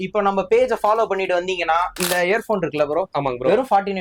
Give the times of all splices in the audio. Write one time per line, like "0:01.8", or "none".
0:02.0